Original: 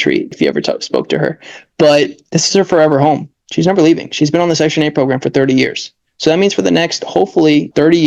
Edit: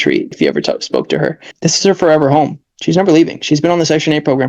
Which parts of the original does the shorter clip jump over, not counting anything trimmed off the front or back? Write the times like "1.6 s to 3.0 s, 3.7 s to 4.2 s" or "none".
1.5 s to 2.2 s